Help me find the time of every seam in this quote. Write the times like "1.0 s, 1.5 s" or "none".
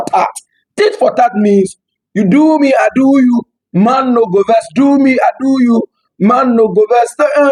none